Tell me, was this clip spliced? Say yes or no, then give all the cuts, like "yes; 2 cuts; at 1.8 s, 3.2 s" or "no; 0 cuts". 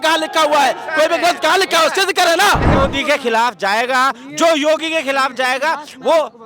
yes; 1 cut; at 2.7 s